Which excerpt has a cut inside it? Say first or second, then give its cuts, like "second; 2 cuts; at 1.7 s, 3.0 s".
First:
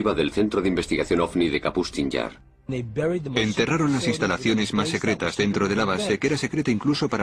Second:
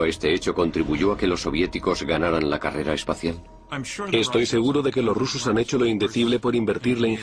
second; 1 cut; at 5.7 s